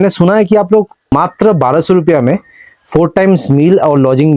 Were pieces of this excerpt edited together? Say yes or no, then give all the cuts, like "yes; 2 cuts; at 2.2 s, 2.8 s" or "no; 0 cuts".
yes; 1 cut; at 1.1 s